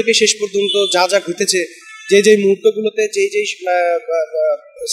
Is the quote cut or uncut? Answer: uncut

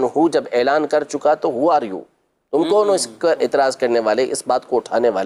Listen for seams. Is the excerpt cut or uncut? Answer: uncut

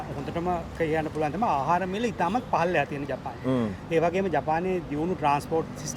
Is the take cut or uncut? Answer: uncut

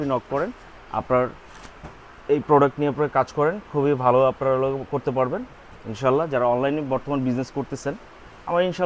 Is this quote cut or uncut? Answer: uncut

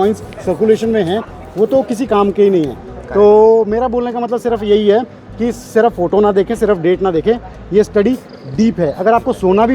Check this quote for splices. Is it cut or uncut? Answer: uncut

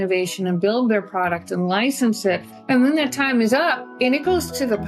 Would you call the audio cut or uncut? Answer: cut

